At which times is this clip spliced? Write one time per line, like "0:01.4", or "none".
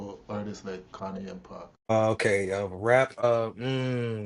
0:01.9
0:03.2